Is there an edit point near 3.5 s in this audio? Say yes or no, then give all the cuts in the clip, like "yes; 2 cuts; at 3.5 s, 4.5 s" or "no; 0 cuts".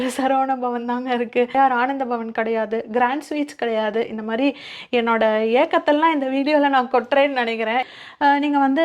no; 2 cuts; at 1.6 s, 7.9 s